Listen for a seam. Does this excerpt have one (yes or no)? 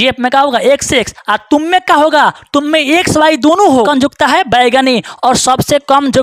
yes